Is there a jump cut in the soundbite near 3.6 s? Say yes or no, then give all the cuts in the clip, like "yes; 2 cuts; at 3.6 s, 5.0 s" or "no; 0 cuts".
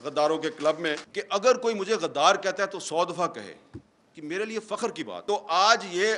no; 2 cuts; at 1.1 s, 5.1 s